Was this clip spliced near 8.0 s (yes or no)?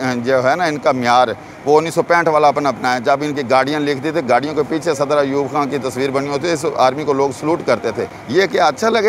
no